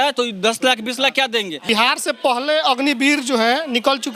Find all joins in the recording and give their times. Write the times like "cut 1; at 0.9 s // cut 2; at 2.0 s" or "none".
cut 1; at 1.5 s

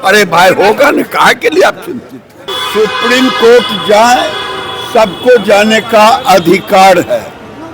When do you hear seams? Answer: cut 1; at 2.5 s

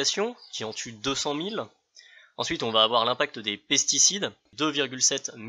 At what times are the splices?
cut 1; at 4.4 s

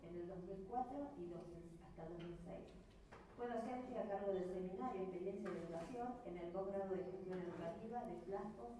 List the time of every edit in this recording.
cut 1; at 2.6 s

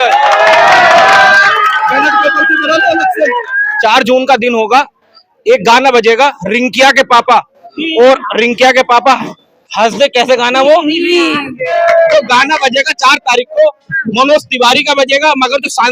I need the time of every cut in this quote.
cut 1; at 3.6 s // cut 2; at 11.7 s

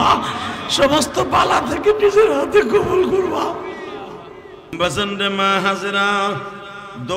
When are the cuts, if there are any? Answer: cut 1; at 4.7 s

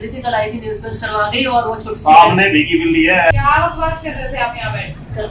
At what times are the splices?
cut 1; at 3.3 s

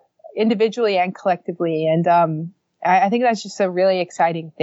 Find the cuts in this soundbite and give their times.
none

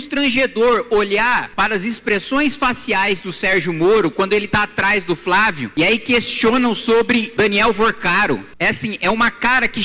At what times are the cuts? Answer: cut 1; at 1.5 s // cut 2; at 5.6 s // cut 3; at 7.3 s // cut 4; at 8.5 s

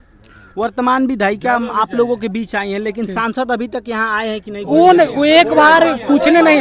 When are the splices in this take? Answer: none

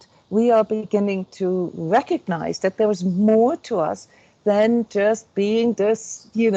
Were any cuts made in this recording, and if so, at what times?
none

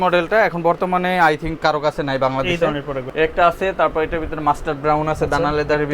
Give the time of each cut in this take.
cut 1; at 3.0 s

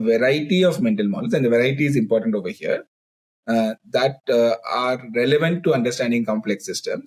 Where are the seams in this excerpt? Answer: none

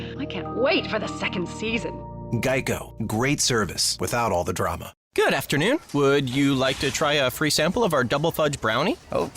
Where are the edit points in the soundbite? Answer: cut 1; at 4.9 s

